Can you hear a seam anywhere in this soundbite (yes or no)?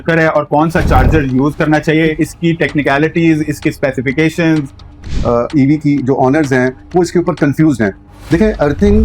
yes